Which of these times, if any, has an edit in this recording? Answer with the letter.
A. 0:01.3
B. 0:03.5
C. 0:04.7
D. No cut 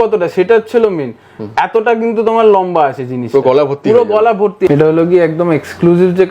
C